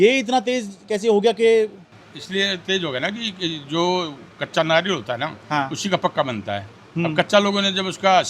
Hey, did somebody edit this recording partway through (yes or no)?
no